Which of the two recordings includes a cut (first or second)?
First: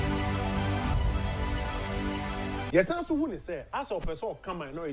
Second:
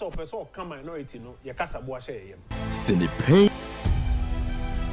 first